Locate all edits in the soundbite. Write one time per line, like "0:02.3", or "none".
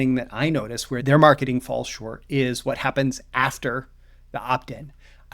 0:01.0